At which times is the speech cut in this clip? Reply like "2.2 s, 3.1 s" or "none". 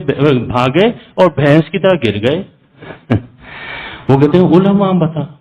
none